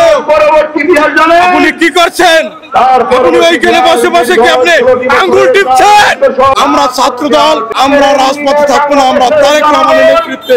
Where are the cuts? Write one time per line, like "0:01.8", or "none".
0:06.5
0:07.7